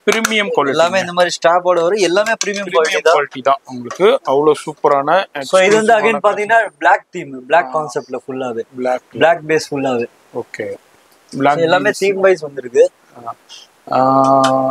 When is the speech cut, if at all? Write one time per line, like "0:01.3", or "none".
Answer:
none